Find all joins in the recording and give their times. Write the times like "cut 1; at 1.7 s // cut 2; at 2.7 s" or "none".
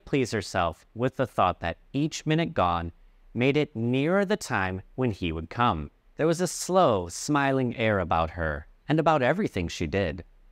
none

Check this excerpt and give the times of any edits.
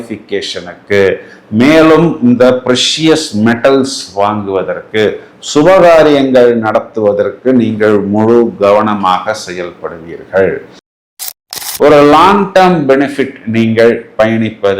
cut 1; at 11.2 s

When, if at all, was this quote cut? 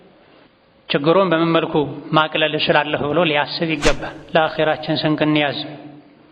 cut 1; at 4.1 s

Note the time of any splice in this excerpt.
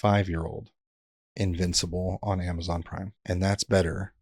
cut 1; at 3.1 s

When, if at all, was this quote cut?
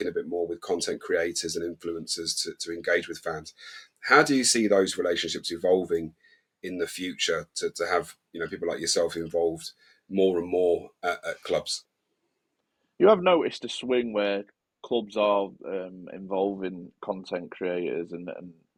none

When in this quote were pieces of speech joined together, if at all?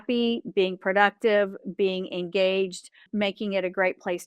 cut 1; at 3.0 s

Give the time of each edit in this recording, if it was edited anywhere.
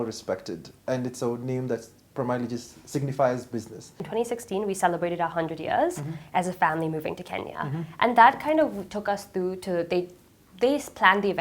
cut 1; at 4.0 s

